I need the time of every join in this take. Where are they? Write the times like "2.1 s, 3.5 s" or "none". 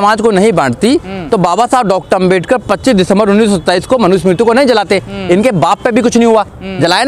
none